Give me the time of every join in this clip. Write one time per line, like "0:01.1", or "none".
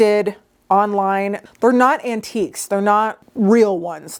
none